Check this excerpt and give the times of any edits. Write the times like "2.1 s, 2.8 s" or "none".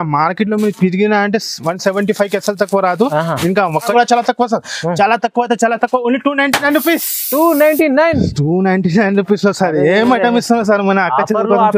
3.9 s